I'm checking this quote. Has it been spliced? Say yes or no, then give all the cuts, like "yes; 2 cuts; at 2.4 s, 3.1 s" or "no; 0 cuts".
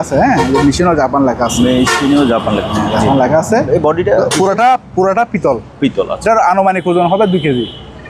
no; 0 cuts